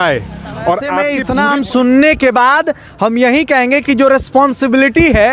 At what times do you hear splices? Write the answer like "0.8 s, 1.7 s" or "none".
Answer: 1.2 s